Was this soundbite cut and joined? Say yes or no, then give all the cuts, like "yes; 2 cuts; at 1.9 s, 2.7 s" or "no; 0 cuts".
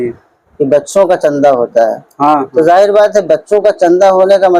no; 0 cuts